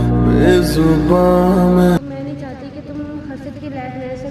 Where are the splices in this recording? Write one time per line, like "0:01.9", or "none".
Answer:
0:02.0